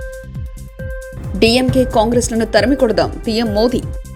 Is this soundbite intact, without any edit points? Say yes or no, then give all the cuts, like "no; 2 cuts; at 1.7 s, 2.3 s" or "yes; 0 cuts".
yes; 0 cuts